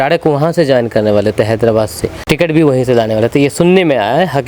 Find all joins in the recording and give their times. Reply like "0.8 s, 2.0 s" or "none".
2.2 s